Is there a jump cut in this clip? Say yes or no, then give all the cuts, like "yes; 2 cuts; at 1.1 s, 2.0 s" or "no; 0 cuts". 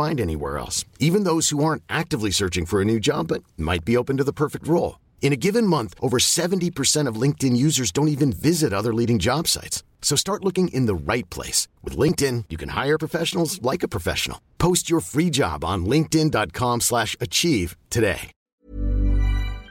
yes; 1 cut; at 18.4 s